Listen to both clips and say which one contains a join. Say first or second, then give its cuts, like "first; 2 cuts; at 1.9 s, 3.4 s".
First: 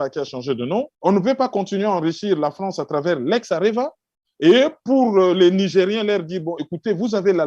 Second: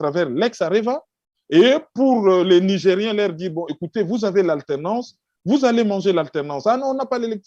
first; 1 cut; at 0.9 s